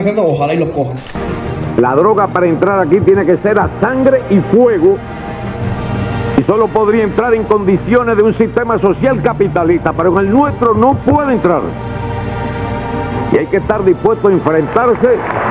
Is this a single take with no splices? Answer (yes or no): no